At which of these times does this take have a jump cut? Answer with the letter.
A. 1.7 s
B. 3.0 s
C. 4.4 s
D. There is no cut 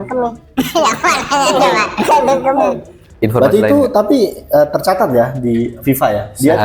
B